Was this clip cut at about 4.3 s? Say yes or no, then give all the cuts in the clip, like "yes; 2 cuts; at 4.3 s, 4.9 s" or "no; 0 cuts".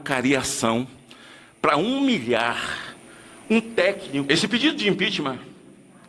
yes; 1 cut; at 4.3 s